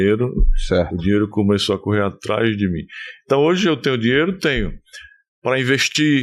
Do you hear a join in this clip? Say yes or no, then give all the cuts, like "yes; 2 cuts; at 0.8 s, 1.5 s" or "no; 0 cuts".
no; 0 cuts